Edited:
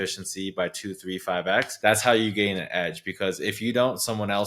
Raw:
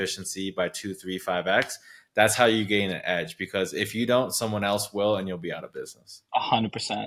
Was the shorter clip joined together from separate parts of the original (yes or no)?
yes